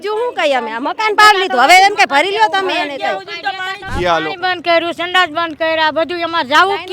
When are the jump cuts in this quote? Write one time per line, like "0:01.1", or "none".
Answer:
0:03.8